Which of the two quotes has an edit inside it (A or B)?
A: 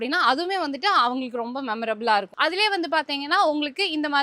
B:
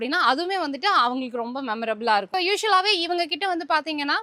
A